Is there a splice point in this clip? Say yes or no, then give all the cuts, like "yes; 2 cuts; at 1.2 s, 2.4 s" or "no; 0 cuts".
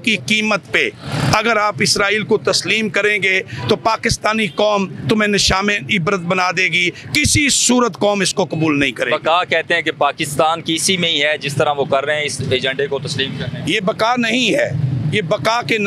no; 0 cuts